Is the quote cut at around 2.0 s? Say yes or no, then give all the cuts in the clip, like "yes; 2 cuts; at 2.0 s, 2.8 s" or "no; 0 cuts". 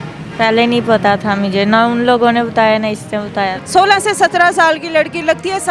no; 1 cut; at 3.6 s